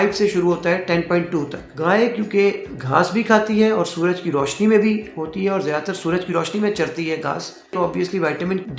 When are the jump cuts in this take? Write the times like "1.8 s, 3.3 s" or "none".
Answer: 1.6 s